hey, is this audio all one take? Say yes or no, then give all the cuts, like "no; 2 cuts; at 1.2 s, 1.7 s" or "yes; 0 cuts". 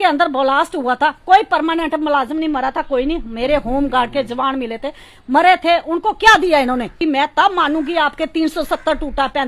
no; 1 cut; at 7.0 s